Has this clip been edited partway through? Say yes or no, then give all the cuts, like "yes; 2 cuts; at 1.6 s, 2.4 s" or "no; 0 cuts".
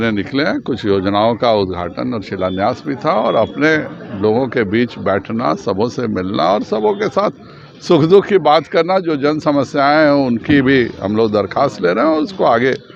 no; 0 cuts